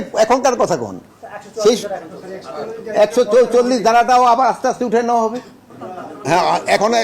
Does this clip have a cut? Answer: yes; 1 cut; at 5.7 s

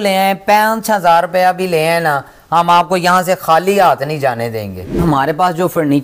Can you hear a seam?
yes; 1 cut; at 5.0 s

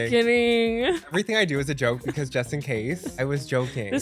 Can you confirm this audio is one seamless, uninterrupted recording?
no; 2 cuts; at 1.1 s, 3.2 s

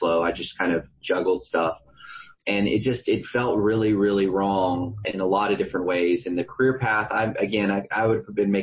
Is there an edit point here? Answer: no; 0 cuts

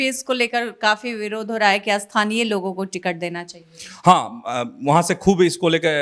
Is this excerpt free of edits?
yes; 0 cuts

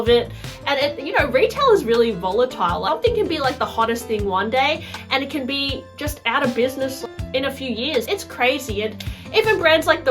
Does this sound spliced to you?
yes; 3 cuts; at 2.8 s, 7.0 s, 8.1 s

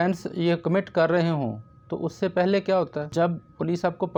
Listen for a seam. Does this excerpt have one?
no; 0 cuts

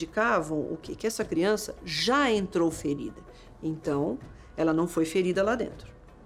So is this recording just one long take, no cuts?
yes; 0 cuts

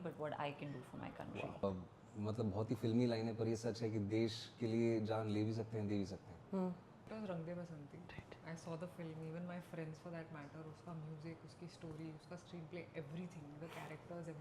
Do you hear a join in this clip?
yes; 2 cuts; at 1.6 s, 7.1 s

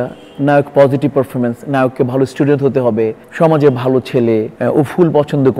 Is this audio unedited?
no; 2 cuts; at 3.2 s, 4.5 s

